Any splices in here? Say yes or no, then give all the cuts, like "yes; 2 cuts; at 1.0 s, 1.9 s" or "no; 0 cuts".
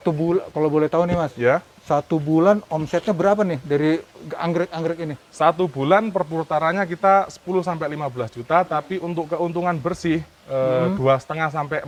no; 0 cuts